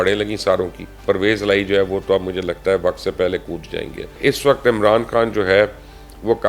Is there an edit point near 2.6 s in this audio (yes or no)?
no